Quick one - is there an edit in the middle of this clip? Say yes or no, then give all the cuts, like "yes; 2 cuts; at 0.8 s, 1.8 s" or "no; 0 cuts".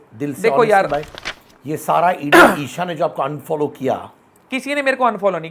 yes; 1 cut; at 1.1 s